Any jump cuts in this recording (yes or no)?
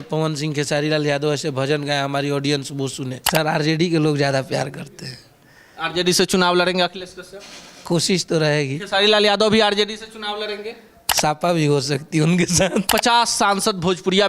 yes